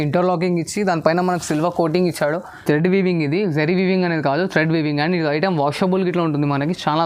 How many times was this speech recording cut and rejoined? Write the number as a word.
one